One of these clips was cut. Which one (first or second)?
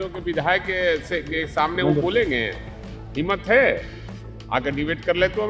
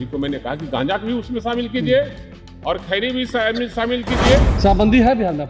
second